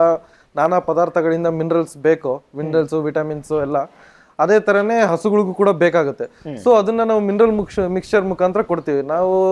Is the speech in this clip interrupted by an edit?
no; 0 cuts

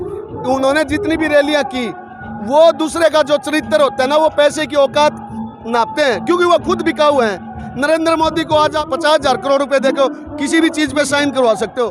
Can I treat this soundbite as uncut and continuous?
no; 1 cut; at 8.8 s

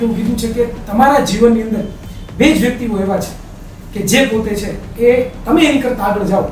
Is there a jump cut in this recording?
no; 0 cuts

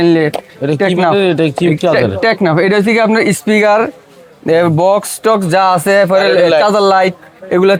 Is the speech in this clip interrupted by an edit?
no; 0 cuts

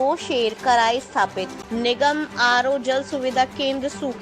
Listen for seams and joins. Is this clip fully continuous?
no; 1 cut; at 1.6 s

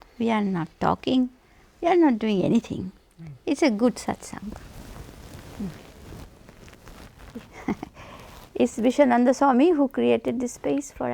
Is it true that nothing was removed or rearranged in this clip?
no; 1 cut; at 7.2 s

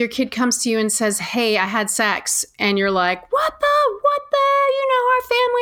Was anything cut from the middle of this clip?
no; 0 cuts

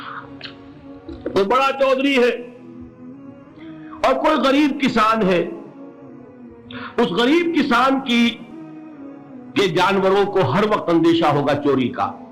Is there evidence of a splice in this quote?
no; 0 cuts

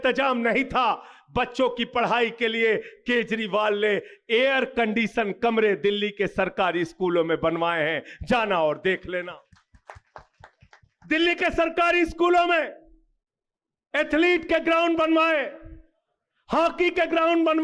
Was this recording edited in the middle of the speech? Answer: no; 0 cuts

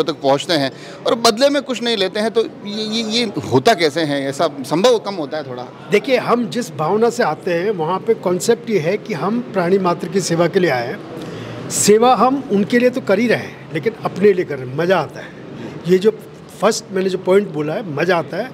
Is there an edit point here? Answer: no; 0 cuts

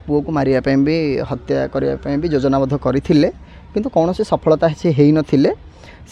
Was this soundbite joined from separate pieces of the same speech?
no; 0 cuts

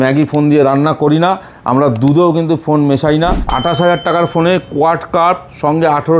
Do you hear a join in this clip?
yes; 1 cut; at 3.4 s

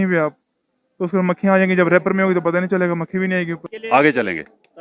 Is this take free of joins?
no; 1 cut; at 3.7 s

